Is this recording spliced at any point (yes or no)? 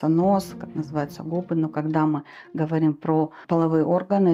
yes